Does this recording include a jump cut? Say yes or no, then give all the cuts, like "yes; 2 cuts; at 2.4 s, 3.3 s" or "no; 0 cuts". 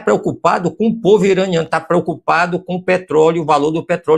no; 0 cuts